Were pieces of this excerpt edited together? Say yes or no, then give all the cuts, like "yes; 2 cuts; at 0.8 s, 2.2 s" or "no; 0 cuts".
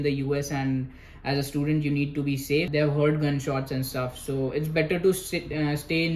yes; 1 cut; at 2.7 s